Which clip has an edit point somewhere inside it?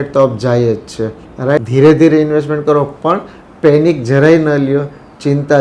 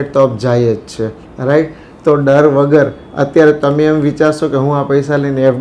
first; 1 cut; at 1.6 s

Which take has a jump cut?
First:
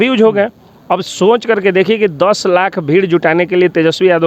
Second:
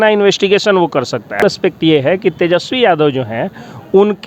second; 1 cut; at 1.4 s

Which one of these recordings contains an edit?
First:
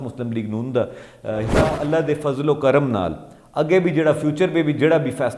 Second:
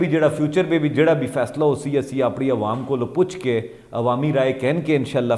first; 1 cut; at 1.7 s

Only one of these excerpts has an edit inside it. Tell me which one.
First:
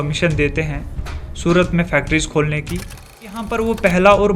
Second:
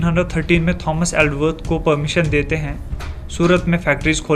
first; 1 cut; at 3.4 s

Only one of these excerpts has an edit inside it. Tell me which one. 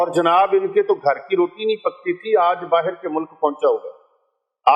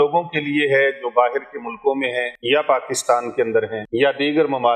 second; 2 cuts; at 2.3 s, 3.8 s

